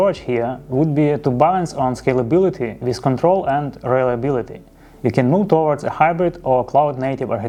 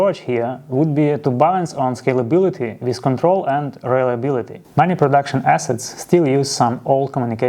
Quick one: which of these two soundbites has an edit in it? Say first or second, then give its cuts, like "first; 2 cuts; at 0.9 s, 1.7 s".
second; 1 cut; at 4.6 s